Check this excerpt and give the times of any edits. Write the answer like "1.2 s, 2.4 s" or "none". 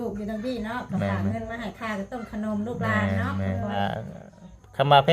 3.8 s